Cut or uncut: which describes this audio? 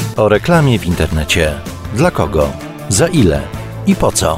uncut